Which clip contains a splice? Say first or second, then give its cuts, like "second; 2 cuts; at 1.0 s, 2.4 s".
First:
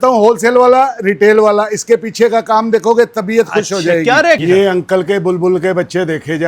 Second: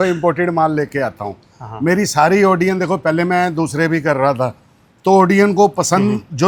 first; 1 cut; at 4.4 s